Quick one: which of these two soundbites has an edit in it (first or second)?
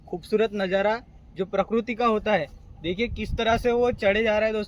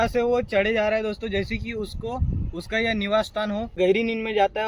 second